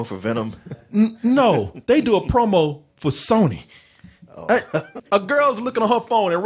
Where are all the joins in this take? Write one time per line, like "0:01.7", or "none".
0:05.0

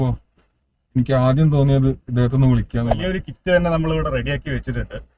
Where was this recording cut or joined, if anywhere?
0:03.0

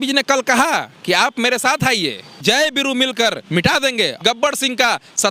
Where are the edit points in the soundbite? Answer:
0:02.4
0:04.2

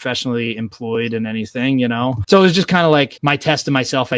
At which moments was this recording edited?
0:03.1

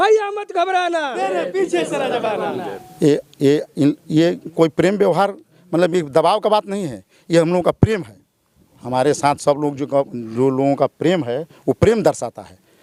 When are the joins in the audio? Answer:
none

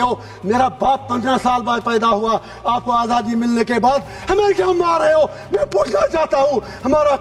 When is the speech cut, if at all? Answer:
none

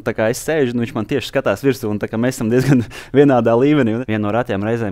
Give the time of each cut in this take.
0:04.0

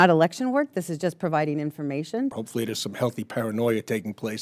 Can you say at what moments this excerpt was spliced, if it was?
0:02.3

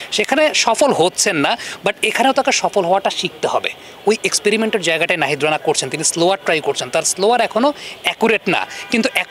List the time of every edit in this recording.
none

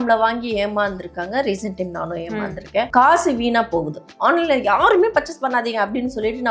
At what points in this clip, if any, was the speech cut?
0:02.9
0:04.1

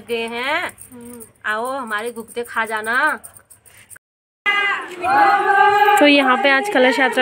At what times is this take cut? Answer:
0:03.9

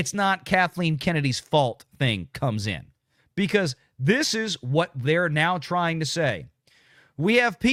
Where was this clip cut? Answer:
none

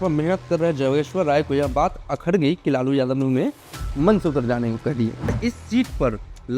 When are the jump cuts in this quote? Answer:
0:05.4

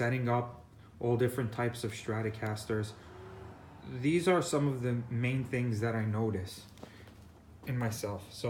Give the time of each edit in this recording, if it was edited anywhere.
0:04.0

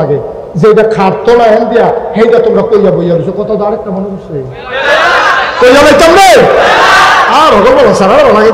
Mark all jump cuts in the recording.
none

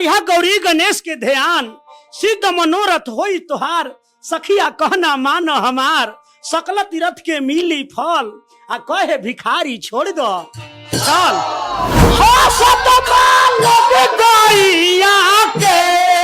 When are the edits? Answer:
0:12.0

